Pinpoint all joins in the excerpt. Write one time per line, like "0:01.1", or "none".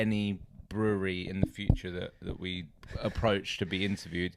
none